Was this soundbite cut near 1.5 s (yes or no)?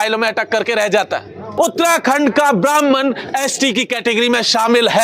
yes